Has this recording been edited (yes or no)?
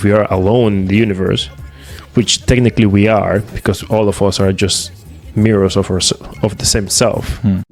no